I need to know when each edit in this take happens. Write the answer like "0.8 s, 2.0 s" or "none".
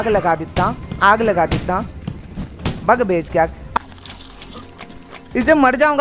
3.6 s